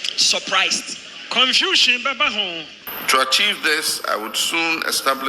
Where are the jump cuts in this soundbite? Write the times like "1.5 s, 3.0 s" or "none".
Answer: 2.9 s